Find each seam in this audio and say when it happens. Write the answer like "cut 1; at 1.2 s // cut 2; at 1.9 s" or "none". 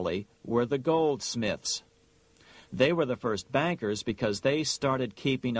cut 1; at 2.9 s